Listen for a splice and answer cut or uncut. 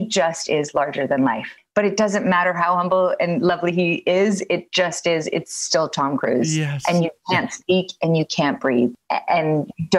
cut